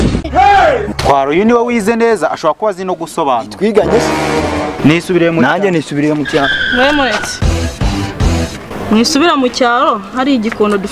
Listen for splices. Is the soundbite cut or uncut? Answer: uncut